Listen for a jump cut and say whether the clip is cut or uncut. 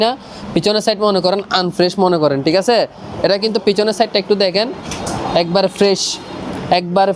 uncut